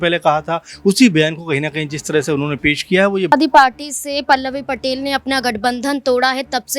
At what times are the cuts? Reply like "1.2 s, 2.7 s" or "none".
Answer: 3.3 s